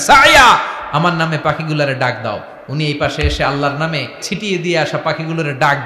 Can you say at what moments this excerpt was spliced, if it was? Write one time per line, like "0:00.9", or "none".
0:04.2